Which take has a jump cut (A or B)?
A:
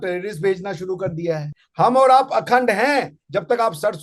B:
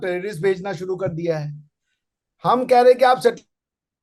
A